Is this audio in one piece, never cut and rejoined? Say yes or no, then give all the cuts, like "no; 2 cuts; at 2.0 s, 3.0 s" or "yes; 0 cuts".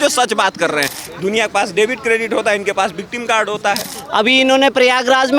no; 2 cuts; at 1.0 s, 3.9 s